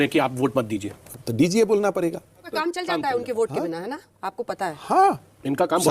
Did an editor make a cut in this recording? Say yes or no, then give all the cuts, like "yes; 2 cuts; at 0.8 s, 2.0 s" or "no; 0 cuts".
yes; 1 cut; at 2.4 s